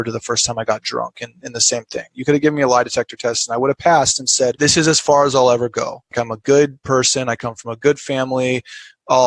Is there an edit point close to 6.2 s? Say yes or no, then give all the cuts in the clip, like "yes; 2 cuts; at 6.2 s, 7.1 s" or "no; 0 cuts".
yes; 2 cuts; at 4.6 s, 6.2 s